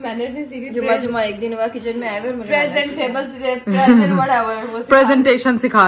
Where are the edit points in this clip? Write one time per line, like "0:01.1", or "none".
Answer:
none

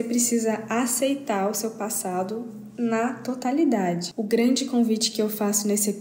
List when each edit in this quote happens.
0:04.1

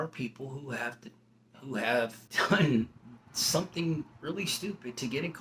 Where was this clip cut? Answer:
0:02.2

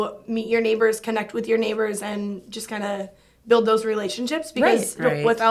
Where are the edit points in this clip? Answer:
none

